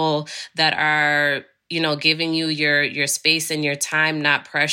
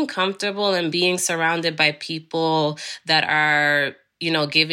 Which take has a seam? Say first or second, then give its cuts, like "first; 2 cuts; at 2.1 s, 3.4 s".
second; 1 cut; at 0.9 s